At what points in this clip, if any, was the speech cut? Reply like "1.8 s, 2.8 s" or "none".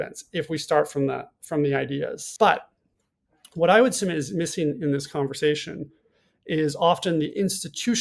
2.2 s